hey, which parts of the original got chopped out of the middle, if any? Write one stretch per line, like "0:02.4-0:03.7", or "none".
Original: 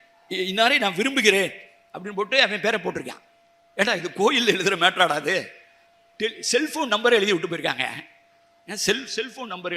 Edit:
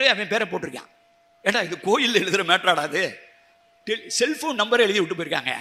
none